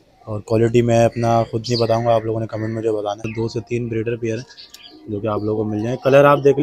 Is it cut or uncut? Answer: cut